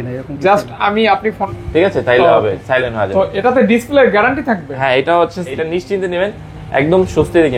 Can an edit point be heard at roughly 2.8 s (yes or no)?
no